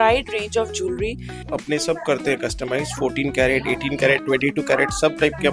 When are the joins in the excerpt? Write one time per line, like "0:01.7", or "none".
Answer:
0:01.4

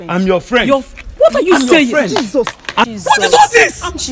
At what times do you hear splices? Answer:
0:02.8

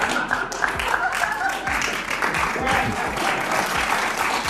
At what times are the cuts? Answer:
none

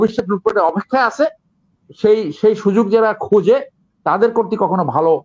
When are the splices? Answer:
none

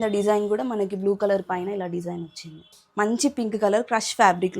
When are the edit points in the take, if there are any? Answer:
0:02.8

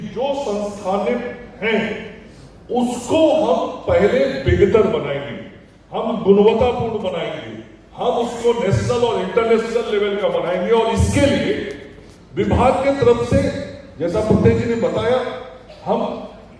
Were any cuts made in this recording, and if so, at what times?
none

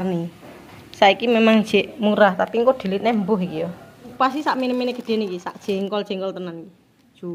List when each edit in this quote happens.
0:04.1

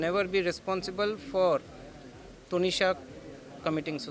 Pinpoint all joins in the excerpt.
none

